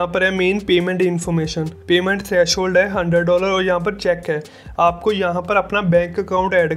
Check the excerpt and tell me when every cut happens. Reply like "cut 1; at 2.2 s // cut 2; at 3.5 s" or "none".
none

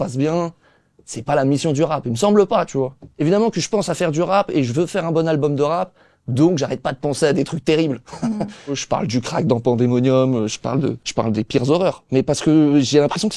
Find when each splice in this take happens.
cut 1; at 3.0 s // cut 2; at 8.8 s // cut 3; at 11.0 s

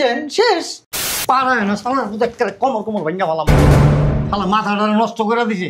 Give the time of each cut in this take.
cut 1; at 1.1 s

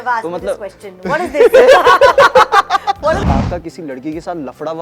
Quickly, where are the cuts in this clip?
cut 1; at 3.2 s

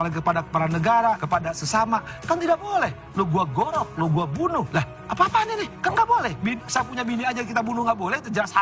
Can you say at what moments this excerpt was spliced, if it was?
cut 1; at 1.2 s // cut 2; at 4.7 s // cut 3; at 5.7 s

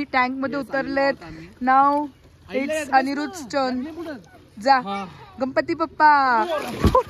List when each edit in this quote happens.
none

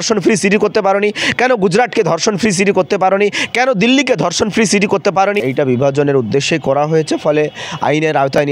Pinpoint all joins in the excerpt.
cut 1; at 5.4 s // cut 2; at 7.2 s

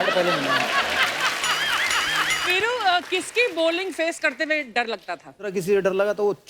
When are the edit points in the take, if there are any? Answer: cut 1; at 2.4 s // cut 2; at 5.5 s

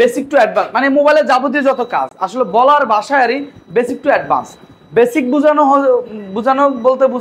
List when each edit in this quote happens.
none

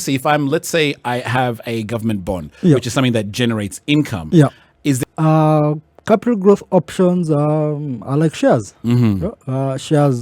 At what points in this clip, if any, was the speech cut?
cut 1; at 5.0 s

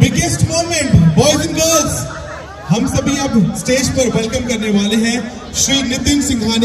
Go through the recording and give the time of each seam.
none

